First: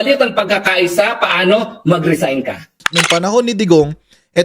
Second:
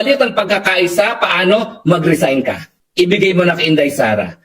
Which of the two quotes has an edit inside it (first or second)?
first